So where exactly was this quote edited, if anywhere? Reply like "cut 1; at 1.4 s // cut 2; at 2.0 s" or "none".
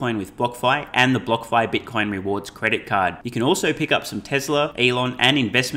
cut 1; at 4.7 s

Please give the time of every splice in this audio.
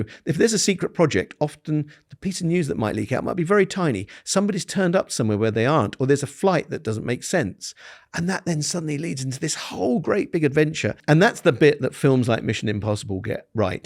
cut 1; at 11.0 s

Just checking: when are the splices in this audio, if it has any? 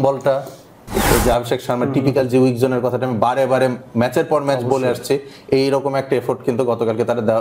cut 1; at 1.0 s

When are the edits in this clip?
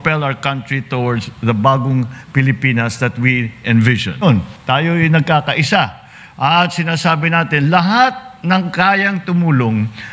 cut 1; at 4.2 s

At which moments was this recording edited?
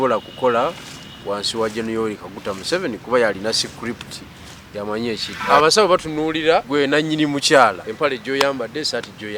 cut 1; at 5.3 s // cut 2; at 6.7 s // cut 3; at 7.9 s

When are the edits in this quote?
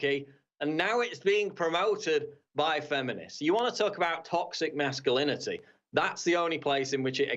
none

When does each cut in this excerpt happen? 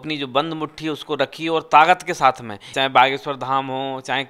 cut 1; at 2.7 s

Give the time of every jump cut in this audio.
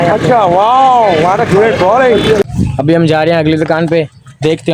cut 1; at 2.5 s

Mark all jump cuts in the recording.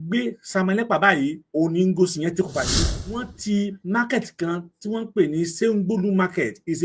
cut 1; at 2.7 s

